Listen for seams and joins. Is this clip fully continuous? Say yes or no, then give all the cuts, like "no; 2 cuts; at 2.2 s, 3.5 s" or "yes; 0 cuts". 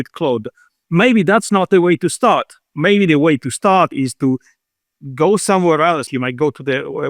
no; 1 cut; at 6.1 s